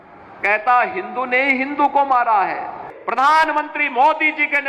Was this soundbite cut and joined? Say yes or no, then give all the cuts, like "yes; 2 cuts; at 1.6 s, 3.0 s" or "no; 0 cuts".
yes; 1 cut; at 2.9 s